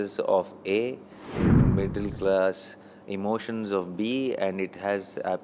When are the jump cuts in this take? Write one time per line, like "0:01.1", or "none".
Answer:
0:01.6